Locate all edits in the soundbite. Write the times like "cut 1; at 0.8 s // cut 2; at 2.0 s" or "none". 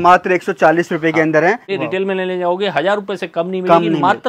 cut 1; at 1.7 s